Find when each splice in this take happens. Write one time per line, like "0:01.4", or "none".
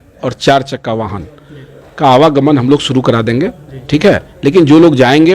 none